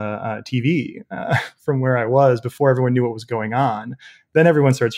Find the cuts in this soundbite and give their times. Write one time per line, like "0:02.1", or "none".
none